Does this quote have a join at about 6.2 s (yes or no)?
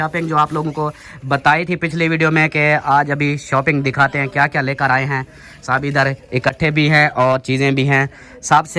no